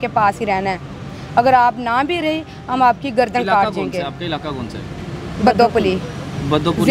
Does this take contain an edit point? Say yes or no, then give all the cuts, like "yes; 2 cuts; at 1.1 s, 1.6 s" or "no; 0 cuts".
no; 0 cuts